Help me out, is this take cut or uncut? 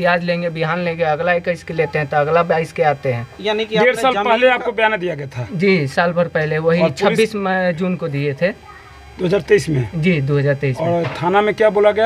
uncut